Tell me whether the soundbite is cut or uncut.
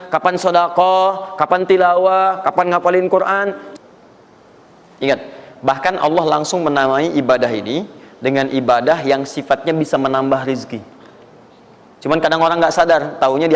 cut